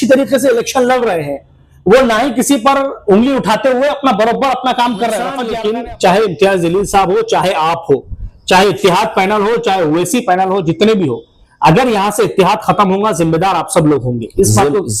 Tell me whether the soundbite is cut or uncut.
cut